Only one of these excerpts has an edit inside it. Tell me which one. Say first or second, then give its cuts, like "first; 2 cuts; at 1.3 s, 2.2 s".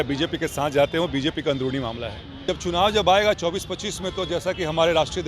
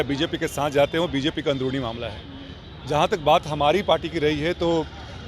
first; 1 cut; at 2.4 s